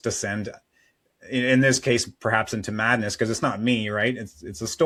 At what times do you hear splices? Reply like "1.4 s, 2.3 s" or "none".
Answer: none